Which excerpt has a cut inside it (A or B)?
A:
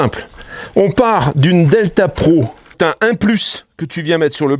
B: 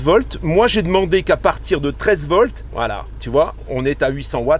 A